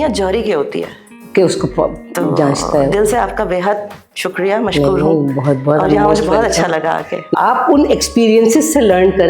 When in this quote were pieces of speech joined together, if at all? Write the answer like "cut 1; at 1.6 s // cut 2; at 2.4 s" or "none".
cut 1; at 7.3 s